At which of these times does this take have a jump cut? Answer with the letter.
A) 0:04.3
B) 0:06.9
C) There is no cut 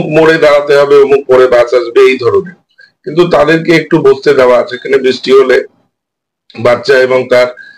C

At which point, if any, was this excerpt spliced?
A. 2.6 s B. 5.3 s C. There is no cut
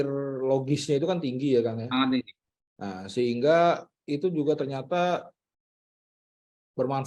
C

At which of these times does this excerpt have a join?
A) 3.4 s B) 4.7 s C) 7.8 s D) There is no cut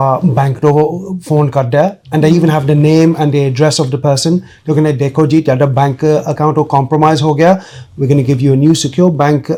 D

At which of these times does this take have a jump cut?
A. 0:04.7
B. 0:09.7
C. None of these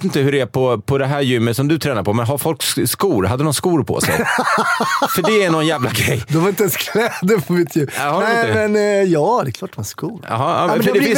C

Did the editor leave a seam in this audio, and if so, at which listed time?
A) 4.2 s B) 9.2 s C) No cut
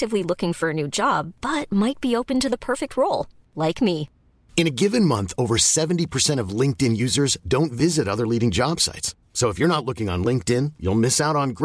C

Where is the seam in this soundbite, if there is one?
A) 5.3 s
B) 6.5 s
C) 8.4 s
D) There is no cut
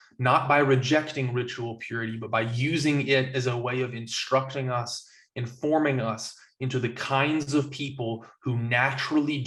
D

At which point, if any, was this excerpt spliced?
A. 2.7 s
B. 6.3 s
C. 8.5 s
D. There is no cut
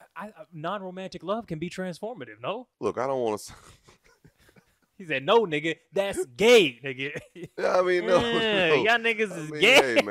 A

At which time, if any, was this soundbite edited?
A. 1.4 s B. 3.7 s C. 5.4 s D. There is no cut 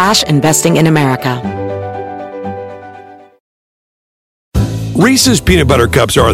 A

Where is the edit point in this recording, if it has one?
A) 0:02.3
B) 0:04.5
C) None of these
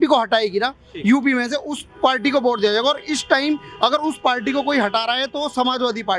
C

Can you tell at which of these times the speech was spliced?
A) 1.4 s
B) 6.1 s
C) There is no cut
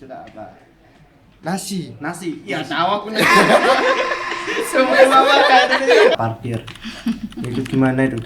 B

